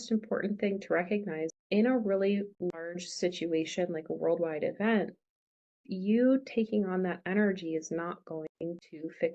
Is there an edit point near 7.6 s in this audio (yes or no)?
no